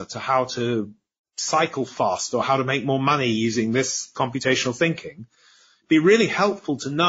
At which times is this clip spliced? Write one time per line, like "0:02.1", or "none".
0:04.1